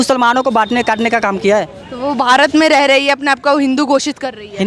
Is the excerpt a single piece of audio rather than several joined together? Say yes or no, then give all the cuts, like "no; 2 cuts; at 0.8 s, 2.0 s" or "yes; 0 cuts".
yes; 0 cuts